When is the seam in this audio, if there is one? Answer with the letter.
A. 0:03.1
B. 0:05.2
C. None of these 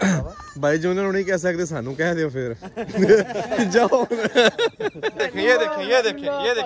B